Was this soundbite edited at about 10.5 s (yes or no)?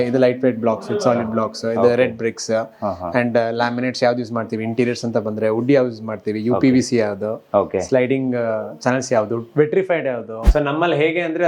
yes